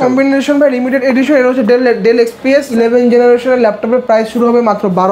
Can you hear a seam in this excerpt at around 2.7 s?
yes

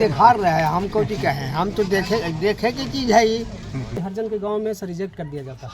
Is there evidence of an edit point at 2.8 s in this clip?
no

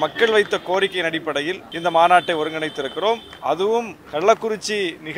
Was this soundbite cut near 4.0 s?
yes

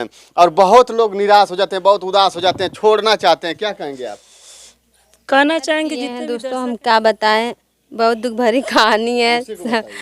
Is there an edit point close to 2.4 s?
no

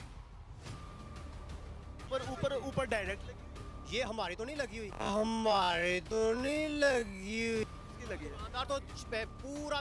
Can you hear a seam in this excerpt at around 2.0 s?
yes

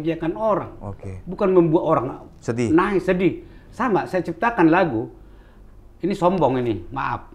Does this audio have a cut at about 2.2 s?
no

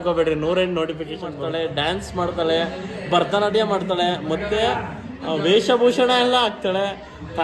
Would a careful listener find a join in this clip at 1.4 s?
yes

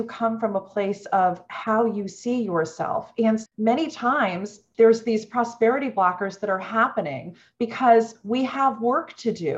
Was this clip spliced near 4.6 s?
yes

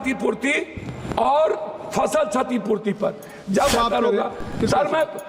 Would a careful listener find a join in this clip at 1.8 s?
no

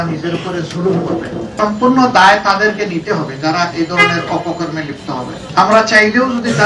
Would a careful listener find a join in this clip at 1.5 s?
yes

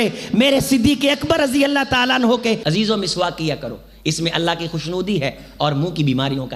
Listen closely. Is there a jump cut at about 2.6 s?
yes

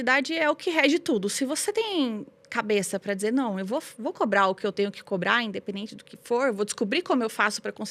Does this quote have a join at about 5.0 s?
no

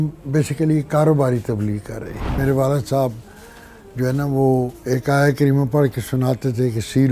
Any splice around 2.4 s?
yes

